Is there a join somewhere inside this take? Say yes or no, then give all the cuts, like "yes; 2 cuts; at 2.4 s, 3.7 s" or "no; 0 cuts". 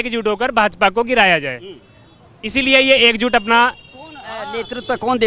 no; 0 cuts